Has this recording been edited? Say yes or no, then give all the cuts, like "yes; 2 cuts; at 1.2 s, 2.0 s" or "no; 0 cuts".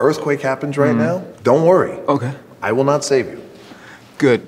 no; 0 cuts